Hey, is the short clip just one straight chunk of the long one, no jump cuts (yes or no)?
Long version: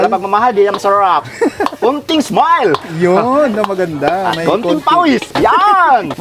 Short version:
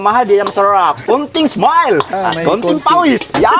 no